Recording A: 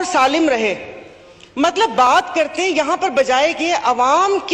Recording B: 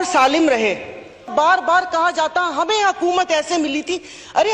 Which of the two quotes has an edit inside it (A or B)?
B